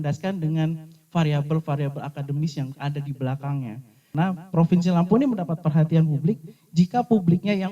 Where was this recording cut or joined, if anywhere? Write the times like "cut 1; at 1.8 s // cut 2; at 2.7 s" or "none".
cut 1; at 4.1 s